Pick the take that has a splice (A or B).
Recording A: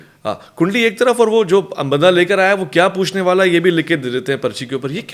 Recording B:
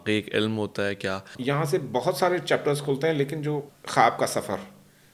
B